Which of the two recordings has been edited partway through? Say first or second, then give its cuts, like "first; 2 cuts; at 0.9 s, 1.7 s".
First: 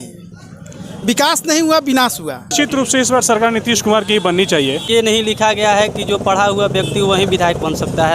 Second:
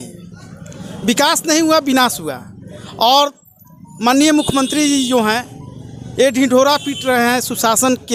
first; 2 cuts; at 2.5 s, 4.9 s